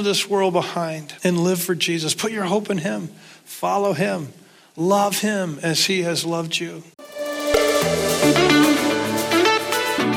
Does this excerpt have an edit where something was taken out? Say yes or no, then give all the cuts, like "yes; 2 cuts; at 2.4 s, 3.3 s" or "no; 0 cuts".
yes; 2 cuts; at 1.0 s, 7.0 s